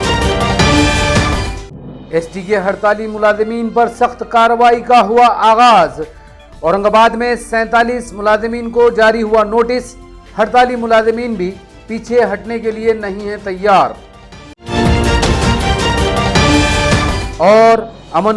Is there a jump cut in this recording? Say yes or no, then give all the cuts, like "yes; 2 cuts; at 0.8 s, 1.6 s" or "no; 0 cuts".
yes; 1 cut; at 1.5 s